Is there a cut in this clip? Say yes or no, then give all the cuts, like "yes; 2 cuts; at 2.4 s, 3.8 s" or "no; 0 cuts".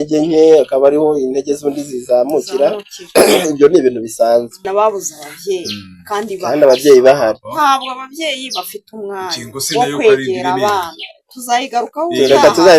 yes; 1 cut; at 4.7 s